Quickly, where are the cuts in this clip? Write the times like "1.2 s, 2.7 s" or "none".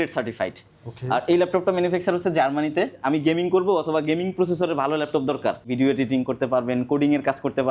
3.0 s, 5.6 s